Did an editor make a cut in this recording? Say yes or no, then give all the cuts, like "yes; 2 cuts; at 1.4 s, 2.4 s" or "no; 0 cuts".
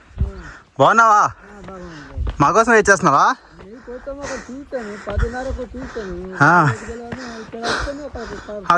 no; 0 cuts